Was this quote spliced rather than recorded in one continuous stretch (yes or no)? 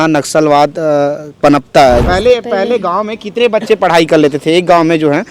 yes